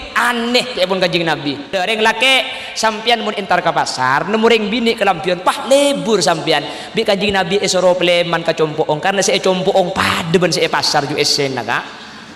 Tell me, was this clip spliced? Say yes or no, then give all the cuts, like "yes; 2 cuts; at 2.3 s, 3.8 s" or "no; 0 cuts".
yes; 1 cut; at 1.8 s